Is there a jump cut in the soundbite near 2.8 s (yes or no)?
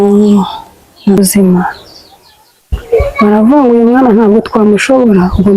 no